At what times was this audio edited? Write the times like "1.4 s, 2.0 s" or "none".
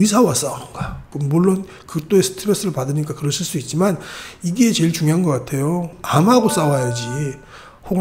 1.1 s